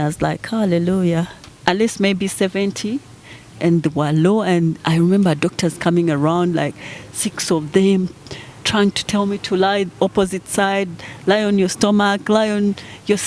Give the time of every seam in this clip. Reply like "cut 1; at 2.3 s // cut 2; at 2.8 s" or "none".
cut 1; at 1.4 s